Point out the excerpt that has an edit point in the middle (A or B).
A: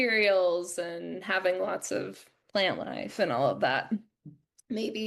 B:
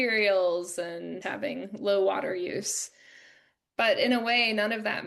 B